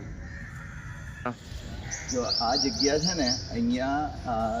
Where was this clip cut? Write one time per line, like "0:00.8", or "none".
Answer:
0:01.1